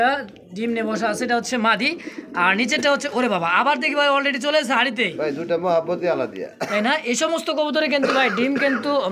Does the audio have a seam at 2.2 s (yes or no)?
no